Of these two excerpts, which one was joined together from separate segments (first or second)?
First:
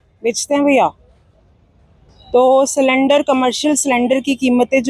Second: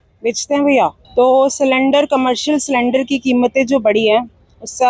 second